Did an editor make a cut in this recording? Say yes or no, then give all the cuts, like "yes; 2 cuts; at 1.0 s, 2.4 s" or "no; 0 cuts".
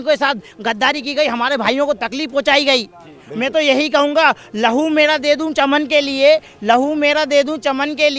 no; 0 cuts